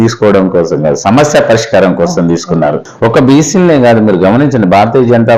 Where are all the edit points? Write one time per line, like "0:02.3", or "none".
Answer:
0:02.9